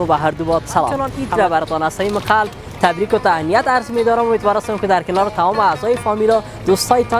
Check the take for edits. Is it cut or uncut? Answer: cut